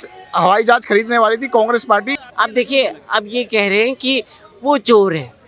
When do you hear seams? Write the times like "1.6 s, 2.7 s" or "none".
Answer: 2.2 s